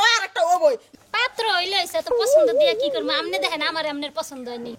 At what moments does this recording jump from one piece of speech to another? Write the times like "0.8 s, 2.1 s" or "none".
1.0 s